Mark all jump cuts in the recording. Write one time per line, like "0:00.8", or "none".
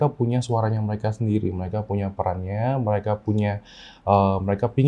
none